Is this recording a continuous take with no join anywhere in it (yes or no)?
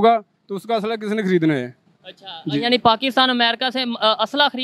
yes